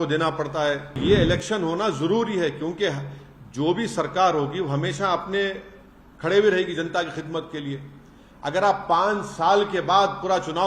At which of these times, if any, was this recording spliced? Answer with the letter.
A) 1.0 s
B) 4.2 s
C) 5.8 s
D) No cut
A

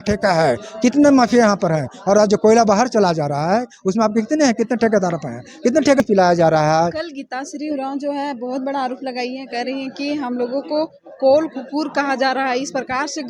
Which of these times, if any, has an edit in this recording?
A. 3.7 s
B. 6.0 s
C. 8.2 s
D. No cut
B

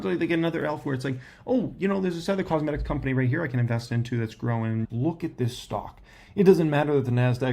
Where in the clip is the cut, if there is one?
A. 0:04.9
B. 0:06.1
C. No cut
A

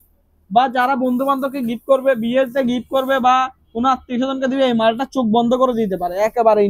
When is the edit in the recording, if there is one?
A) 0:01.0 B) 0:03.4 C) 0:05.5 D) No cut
D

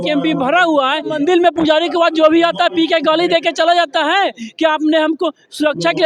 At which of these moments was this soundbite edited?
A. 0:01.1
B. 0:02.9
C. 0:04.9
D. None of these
A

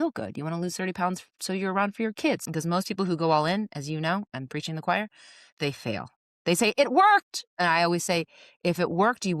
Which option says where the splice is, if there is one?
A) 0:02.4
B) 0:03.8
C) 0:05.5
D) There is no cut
A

